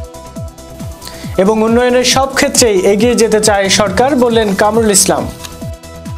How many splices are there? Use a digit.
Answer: 0